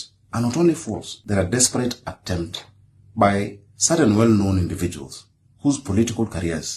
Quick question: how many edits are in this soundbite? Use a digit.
1